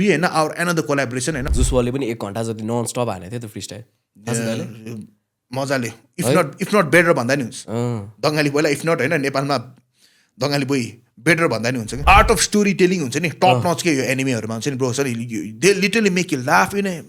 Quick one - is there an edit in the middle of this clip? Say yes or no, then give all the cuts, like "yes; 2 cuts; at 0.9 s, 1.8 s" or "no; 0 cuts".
yes; 2 cuts; at 1.5 s, 12.0 s